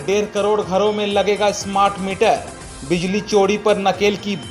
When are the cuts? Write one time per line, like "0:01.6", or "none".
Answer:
none